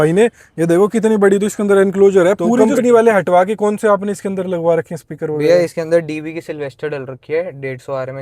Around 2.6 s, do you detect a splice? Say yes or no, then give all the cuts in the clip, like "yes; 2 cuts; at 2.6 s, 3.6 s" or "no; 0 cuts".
yes; 1 cut; at 2.6 s